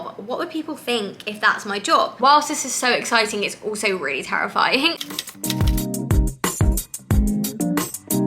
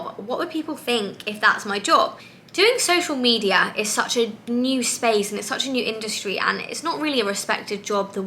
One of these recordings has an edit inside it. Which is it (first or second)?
first